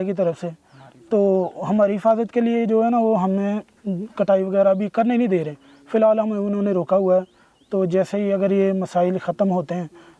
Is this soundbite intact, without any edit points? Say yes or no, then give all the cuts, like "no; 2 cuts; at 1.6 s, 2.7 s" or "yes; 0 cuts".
yes; 0 cuts